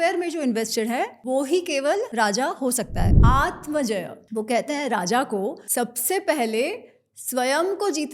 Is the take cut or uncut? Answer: cut